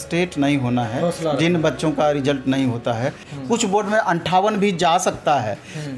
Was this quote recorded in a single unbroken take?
no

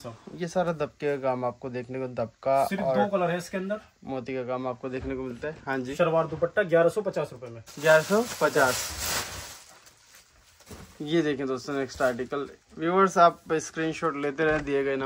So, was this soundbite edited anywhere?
no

